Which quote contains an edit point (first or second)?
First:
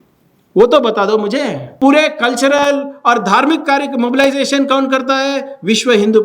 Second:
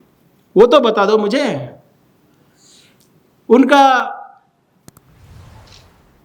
first